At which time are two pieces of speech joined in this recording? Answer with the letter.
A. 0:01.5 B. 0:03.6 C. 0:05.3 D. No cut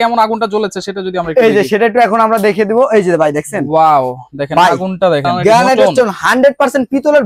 C